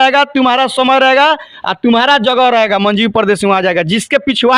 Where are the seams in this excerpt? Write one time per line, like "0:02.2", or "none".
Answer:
none